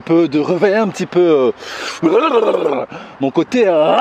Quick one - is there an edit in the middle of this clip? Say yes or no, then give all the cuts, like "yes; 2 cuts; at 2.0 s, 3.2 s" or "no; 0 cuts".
no; 0 cuts